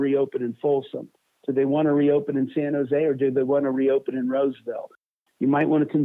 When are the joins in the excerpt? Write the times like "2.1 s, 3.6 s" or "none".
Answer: 5.1 s